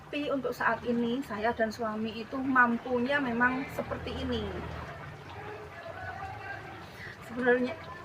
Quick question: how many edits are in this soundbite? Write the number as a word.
one